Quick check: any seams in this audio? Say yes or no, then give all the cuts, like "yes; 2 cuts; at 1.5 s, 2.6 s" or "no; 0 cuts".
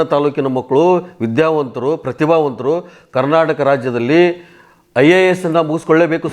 no; 0 cuts